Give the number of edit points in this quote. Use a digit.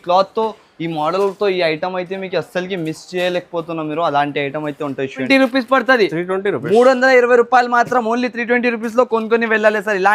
1